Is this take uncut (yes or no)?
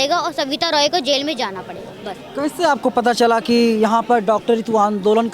yes